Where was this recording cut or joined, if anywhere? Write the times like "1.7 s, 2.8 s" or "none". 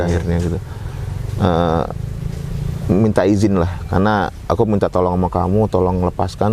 none